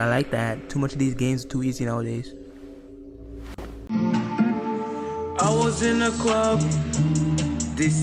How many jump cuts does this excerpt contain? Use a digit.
1